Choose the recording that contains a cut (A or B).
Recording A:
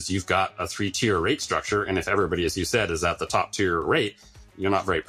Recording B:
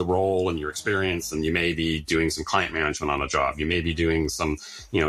A